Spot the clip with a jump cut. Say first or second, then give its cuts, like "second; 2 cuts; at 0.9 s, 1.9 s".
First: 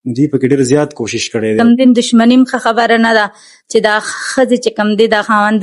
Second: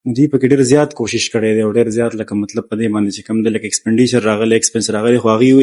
first; 1 cut; at 1.6 s